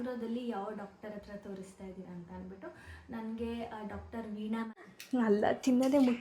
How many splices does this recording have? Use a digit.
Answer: 1